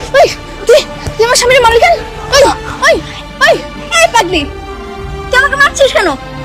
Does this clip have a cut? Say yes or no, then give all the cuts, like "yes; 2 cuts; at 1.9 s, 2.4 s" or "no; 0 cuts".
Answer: no; 0 cuts